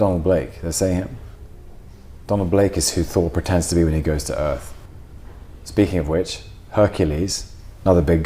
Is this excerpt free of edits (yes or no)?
no